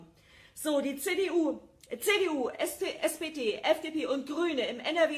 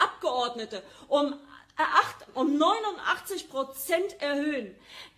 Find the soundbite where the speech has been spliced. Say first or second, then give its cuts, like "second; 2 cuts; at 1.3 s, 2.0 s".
first; 1 cut; at 3.8 s